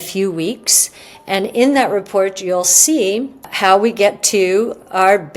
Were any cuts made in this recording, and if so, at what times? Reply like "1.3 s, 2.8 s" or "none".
3.5 s